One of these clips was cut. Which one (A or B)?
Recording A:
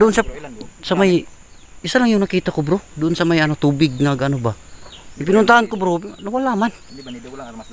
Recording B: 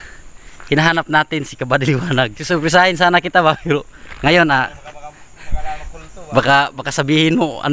B